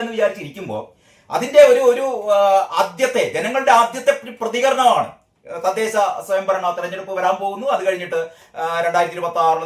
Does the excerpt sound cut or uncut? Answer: uncut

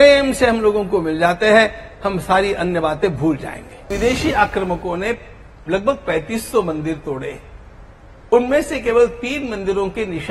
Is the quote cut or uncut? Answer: cut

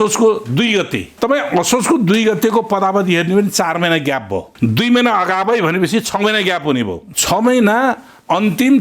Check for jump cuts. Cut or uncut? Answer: cut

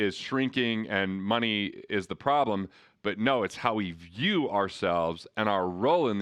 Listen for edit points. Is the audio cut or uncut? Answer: uncut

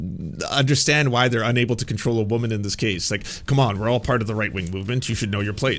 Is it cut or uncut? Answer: uncut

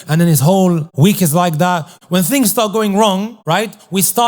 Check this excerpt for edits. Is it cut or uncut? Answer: cut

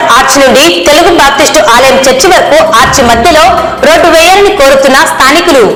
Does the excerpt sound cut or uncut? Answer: uncut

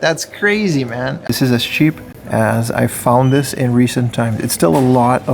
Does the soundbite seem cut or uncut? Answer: cut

